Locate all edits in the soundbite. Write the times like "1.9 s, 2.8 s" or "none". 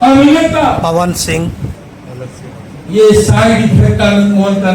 none